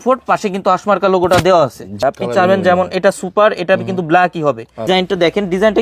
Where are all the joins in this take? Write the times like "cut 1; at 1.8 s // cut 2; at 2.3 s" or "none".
cut 1; at 2.0 s // cut 2; at 4.9 s